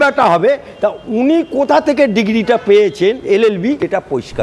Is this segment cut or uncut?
cut